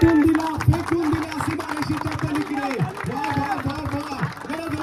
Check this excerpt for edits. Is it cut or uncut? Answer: uncut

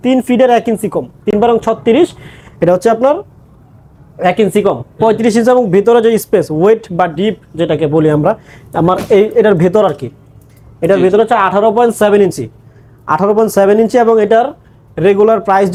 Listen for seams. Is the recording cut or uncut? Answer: uncut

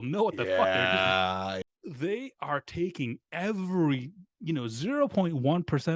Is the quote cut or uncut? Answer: cut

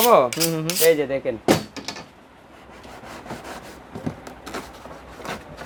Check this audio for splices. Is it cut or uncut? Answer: uncut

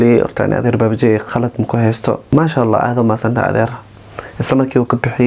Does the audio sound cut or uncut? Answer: cut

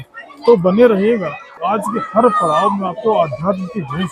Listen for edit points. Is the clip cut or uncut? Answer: cut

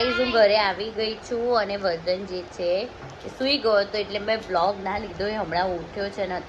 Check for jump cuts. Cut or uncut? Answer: uncut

